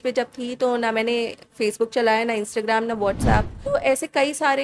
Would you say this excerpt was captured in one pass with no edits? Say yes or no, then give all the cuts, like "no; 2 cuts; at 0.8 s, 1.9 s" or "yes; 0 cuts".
no; 1 cut; at 3.6 s